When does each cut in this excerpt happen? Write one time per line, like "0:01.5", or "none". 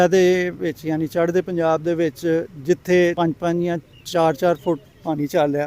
0:03.1